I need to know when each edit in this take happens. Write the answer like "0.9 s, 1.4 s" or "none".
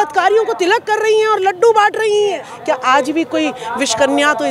2.5 s